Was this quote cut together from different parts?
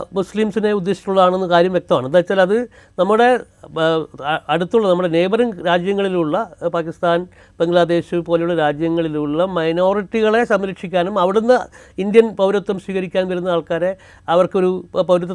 no; 0 cuts

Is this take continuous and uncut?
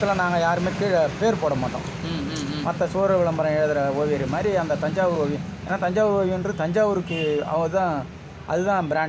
yes; 0 cuts

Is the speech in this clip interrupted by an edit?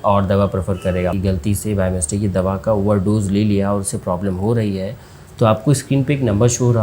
yes; 1 cut; at 1.2 s

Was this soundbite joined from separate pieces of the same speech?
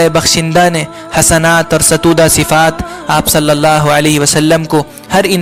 no; 0 cuts

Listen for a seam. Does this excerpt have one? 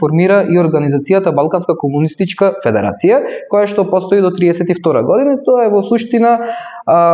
no; 0 cuts

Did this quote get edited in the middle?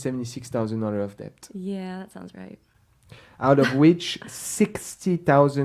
no; 0 cuts

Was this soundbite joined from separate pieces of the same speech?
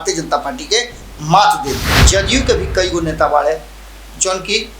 yes; 1 cut; at 1.9 s

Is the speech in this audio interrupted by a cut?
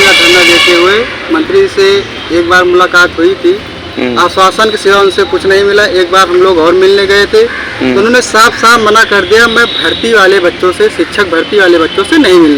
no; 0 cuts

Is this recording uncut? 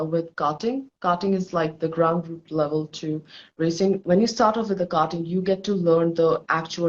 no; 1 cut; at 4.0 s

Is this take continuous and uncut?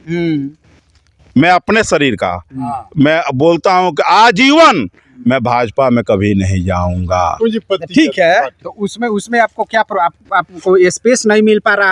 yes; 0 cuts

